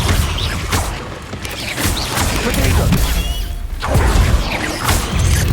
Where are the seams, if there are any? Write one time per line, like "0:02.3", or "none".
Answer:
0:04.4